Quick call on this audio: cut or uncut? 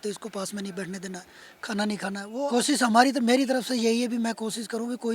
cut